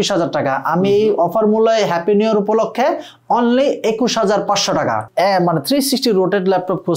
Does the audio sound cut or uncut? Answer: cut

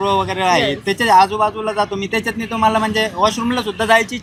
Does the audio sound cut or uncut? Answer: uncut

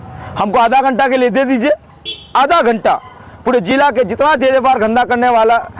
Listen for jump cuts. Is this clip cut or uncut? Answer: uncut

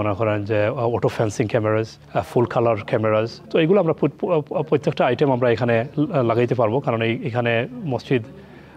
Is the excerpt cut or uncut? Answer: uncut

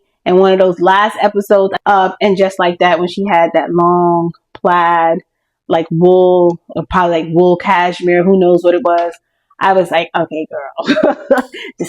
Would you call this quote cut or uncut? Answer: cut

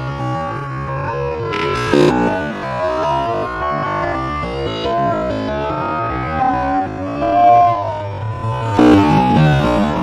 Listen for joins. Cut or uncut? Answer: uncut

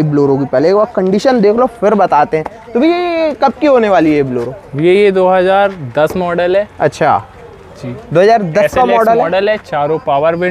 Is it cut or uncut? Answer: uncut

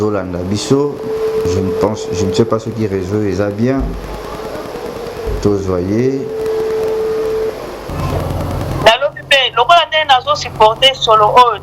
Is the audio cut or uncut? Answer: cut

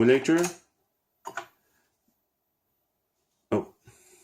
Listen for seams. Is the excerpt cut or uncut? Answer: uncut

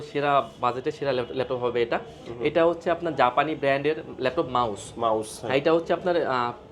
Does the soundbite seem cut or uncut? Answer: uncut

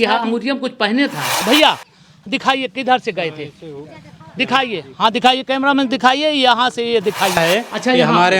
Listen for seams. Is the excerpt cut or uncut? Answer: cut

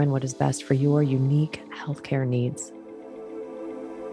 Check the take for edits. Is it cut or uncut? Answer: cut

